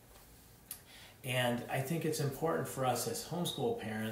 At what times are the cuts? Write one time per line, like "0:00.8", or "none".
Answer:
none